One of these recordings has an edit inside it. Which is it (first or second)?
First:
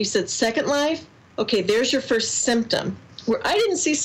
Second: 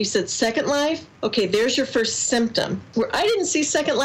second